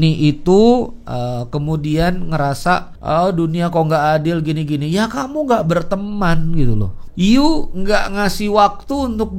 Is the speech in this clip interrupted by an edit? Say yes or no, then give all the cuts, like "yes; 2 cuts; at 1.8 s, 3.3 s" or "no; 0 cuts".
yes; 2 cuts; at 2.9 s, 7.0 s